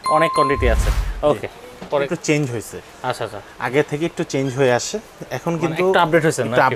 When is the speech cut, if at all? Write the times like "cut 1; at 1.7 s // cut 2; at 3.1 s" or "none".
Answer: cut 1; at 2.1 s